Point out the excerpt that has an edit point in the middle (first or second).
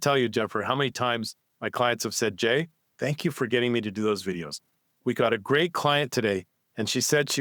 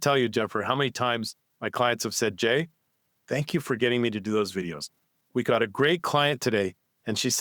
first